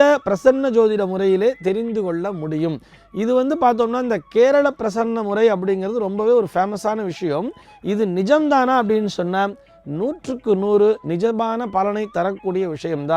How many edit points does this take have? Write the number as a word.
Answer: zero